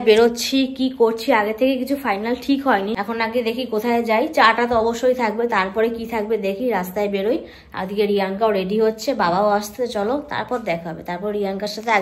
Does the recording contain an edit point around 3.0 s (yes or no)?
no